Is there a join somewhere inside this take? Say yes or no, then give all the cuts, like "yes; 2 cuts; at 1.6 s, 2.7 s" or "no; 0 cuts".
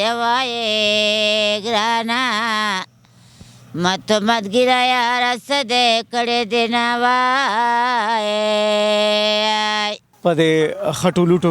yes; 1 cut; at 10.0 s